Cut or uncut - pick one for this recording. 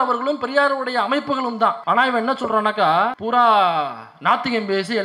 cut